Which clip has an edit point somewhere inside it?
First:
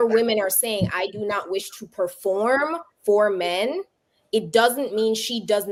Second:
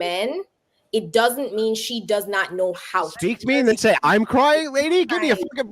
second; 1 cut; at 3.2 s

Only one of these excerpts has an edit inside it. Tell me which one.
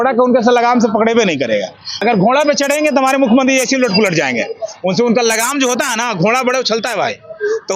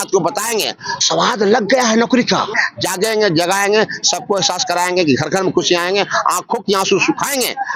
second; 1 cut; at 2.6 s

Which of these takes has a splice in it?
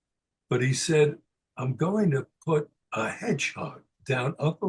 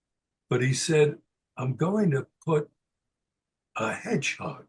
first; 1 cut; at 2.8 s

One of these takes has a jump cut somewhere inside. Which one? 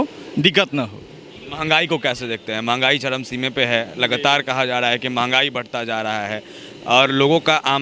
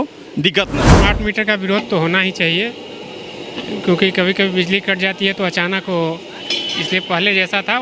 second; 1 cut; at 0.9 s

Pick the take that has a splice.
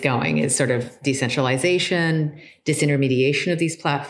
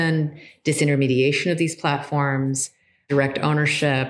second; 1 cut; at 3.0 s

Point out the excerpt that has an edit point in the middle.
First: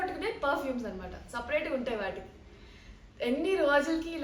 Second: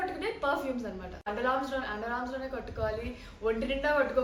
second; 1 cut; at 1.3 s

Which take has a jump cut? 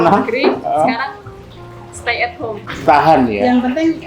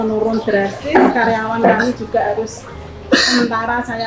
first; 1 cut; at 2.8 s

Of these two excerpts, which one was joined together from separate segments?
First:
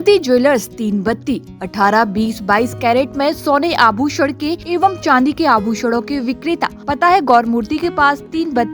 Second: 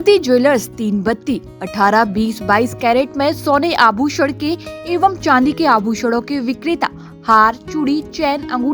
first; 2 cuts; at 4.6 s, 6.8 s

